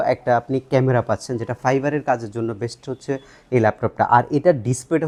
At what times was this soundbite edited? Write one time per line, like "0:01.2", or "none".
none